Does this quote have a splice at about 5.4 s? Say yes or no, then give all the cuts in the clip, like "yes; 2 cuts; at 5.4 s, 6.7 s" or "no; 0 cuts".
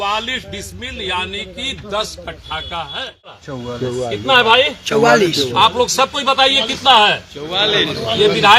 no; 1 cut; at 3.5 s